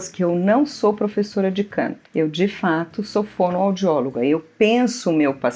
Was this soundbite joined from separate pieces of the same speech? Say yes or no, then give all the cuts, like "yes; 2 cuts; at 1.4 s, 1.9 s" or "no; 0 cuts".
no; 0 cuts